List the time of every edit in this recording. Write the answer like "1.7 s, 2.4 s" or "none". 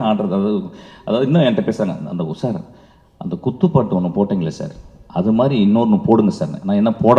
none